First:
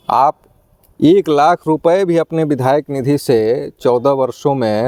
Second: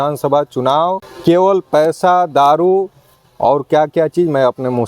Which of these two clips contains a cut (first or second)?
second